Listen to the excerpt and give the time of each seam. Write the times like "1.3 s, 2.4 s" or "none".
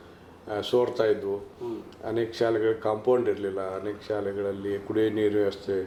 none